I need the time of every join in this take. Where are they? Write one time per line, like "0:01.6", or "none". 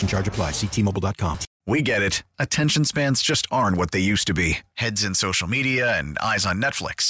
0:01.5